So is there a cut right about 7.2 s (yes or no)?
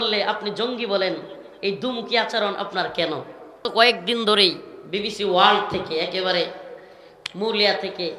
no